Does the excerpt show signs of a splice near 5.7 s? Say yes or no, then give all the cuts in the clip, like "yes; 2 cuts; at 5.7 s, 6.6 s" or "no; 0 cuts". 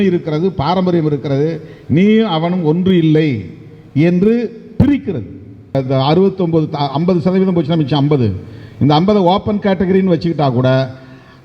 yes; 1 cut; at 5.7 s